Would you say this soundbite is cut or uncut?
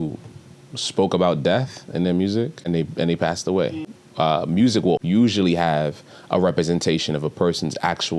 cut